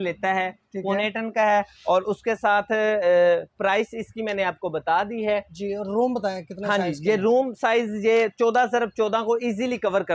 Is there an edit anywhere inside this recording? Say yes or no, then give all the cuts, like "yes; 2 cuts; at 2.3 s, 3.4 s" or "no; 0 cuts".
no; 0 cuts